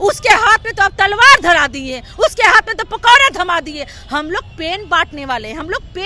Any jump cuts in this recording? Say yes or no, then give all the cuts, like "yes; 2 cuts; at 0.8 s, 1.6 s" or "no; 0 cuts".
no; 0 cuts